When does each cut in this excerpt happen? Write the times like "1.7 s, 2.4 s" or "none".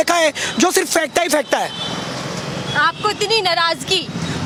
none